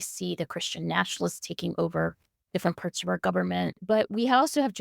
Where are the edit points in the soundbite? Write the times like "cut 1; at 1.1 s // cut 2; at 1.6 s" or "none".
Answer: cut 1; at 3.7 s